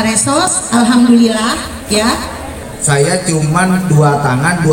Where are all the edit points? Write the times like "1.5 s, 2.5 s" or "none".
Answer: 2.6 s